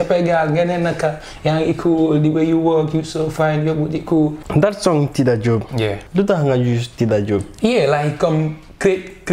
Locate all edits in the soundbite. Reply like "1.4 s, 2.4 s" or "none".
4.5 s